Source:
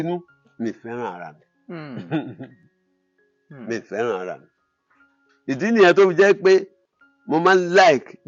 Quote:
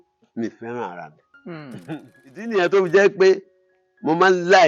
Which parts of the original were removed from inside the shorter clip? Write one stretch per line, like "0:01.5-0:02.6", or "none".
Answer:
0:02.7-0:05.8